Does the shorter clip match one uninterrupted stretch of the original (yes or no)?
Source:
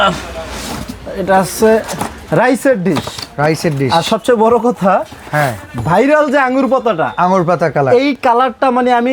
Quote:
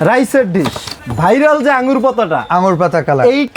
no